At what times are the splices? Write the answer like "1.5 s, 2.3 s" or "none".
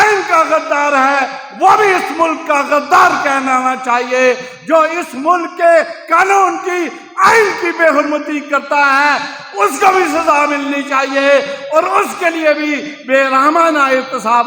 none